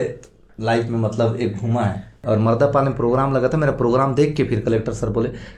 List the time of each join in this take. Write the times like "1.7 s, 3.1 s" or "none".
2.2 s

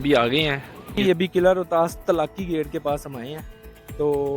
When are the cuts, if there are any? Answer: 0.9 s

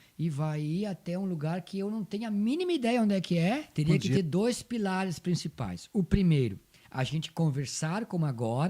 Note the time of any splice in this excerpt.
3.7 s

